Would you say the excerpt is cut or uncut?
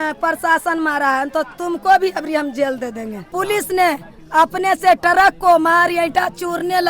cut